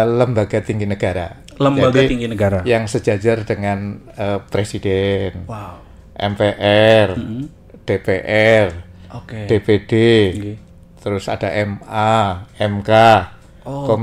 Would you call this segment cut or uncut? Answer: uncut